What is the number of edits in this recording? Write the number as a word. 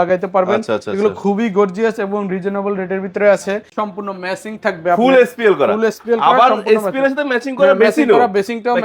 one